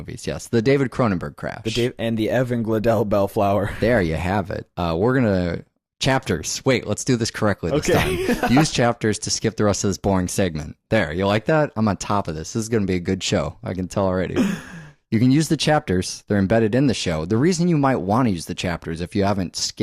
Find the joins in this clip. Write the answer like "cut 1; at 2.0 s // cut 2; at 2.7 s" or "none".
cut 1; at 6.2 s

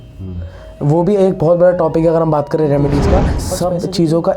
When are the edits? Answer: cut 1; at 3.4 s

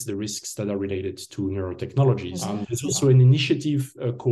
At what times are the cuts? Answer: cut 1; at 2.4 s

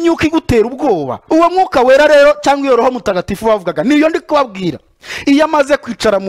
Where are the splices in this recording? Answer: cut 1; at 1.2 s

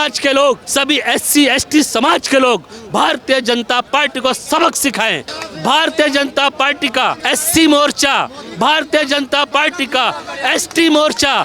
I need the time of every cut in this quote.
cut 1; at 5.3 s // cut 2; at 7.2 s

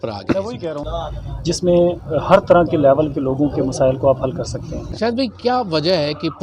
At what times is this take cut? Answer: cut 1; at 0.9 s // cut 2; at 4.9 s

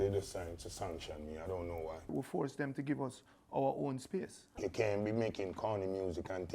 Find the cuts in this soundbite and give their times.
cut 1; at 2.1 s // cut 2; at 4.4 s

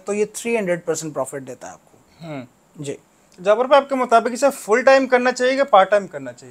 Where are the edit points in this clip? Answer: none

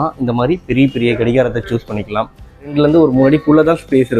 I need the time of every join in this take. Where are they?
cut 1; at 2.7 s

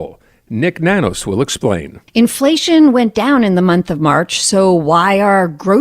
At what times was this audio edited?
cut 1; at 1.9 s

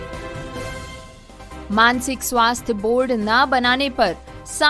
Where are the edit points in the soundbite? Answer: cut 1; at 1.7 s

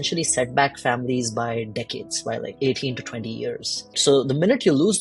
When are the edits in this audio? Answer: cut 1; at 2.5 s // cut 2; at 4.0 s

